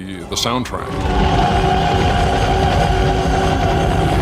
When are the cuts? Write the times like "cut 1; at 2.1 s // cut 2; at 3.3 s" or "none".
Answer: cut 1; at 0.9 s